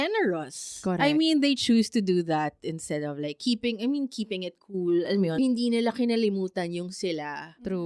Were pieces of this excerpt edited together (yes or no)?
yes